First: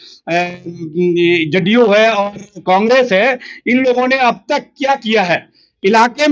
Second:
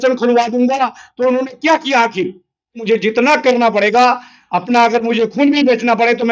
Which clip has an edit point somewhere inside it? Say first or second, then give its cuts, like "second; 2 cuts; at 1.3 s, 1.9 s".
second; 1 cut; at 2.8 s